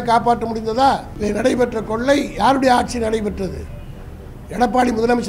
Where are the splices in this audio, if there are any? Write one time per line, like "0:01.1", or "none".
0:01.1